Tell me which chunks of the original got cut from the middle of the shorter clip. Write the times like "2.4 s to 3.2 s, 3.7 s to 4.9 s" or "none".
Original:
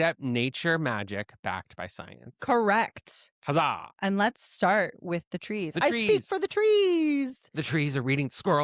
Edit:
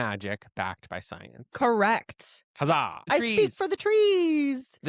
3.9 s to 5.7 s